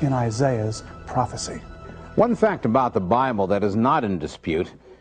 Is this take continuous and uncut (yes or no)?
yes